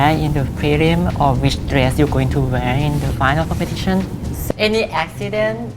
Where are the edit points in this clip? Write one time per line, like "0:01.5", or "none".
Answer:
0:04.4